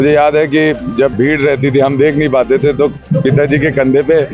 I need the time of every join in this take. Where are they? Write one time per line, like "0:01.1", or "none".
0:01.1